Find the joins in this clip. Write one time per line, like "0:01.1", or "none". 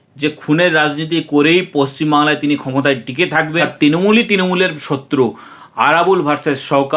0:03.6